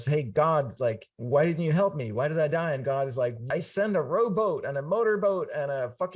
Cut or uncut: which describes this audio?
cut